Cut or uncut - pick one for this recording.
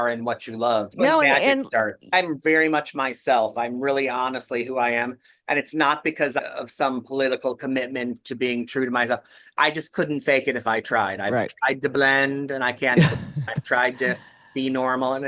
cut